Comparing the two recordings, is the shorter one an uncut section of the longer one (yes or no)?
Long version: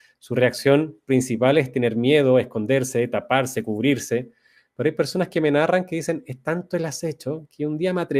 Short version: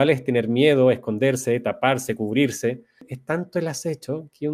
no